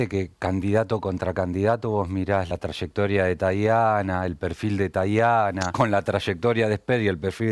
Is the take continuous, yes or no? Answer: no